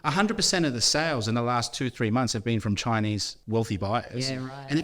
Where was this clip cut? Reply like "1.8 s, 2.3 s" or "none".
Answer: 3.3 s